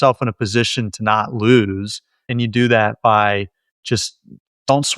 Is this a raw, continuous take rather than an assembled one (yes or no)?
no